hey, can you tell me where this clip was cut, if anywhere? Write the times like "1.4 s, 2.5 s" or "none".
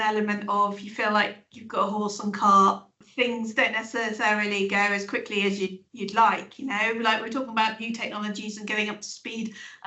3.0 s